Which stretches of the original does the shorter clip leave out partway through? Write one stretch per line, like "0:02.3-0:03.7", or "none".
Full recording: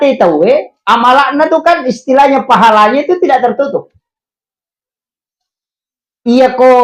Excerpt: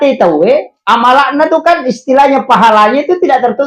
none